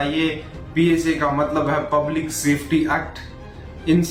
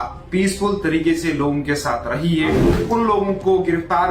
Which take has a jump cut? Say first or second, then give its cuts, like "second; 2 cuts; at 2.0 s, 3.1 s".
second; 1 cut; at 2.7 s